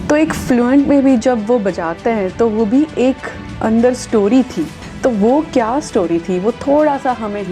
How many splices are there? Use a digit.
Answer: 1